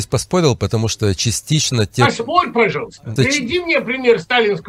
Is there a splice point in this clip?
yes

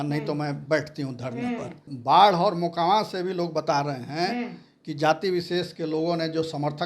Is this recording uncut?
no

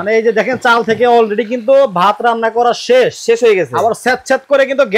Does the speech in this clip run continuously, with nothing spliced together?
yes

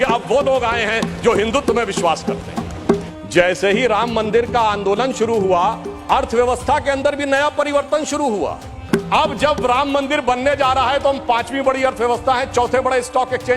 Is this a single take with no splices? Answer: no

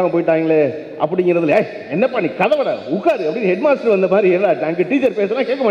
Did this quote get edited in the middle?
no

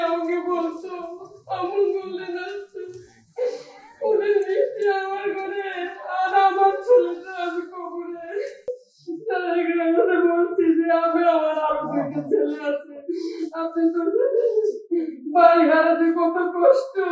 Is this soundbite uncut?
no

